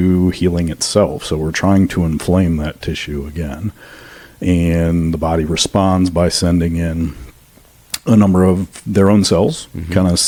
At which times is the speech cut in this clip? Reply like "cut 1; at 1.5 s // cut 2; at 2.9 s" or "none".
none